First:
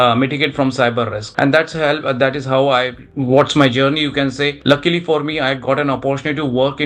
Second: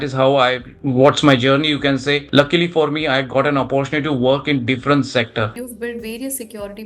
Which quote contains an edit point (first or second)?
second